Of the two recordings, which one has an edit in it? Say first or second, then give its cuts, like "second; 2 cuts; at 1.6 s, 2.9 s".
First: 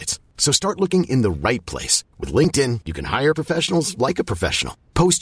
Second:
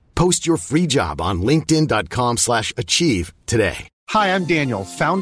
second; 1 cut; at 3.9 s